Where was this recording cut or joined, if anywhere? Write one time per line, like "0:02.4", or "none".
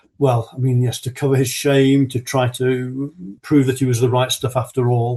0:03.4